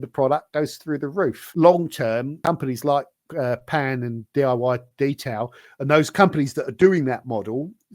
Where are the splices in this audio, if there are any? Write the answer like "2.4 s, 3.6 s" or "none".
1.5 s, 2.4 s